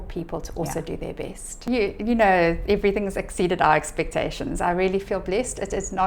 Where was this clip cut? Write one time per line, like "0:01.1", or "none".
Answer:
0:01.7